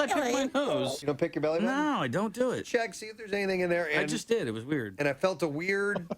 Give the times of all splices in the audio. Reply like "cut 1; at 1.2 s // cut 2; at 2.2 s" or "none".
cut 1; at 1.0 s